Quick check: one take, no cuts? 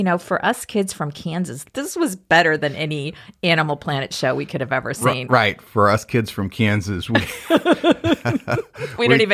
no; 1 cut; at 1.6 s

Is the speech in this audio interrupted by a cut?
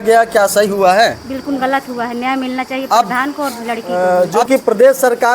yes; 1 cut; at 3.9 s

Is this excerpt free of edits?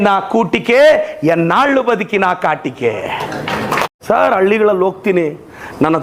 no; 1 cut; at 3.9 s

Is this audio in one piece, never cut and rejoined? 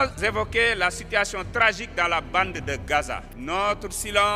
no; 1 cut; at 3.2 s

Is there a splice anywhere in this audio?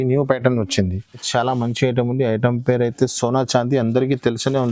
yes; 1 cut; at 1.2 s

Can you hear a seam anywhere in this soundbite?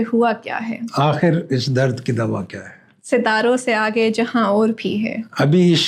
no; 0 cuts

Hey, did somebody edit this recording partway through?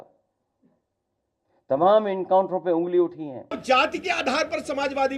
yes; 1 cut; at 3.6 s

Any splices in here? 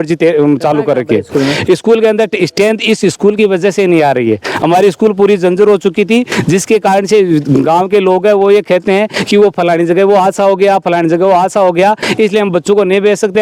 no; 0 cuts

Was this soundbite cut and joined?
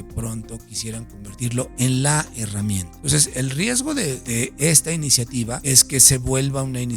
yes; 3 cuts; at 2.9 s, 4.2 s, 5.6 s

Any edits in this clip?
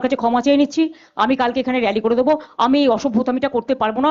no; 0 cuts

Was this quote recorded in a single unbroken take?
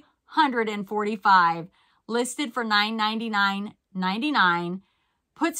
yes; 0 cuts

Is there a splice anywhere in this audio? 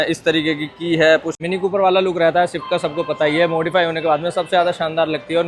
yes; 1 cut; at 1.4 s

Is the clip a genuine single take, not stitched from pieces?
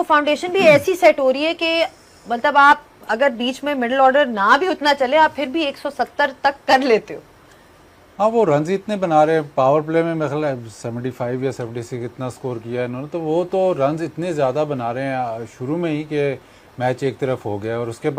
yes; 0 cuts

